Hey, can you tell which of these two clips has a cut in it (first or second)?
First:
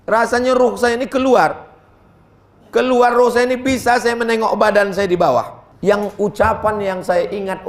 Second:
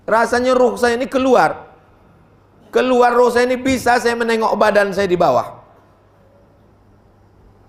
first